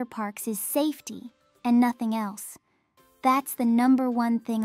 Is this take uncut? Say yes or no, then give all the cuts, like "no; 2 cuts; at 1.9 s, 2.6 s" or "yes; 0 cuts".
yes; 0 cuts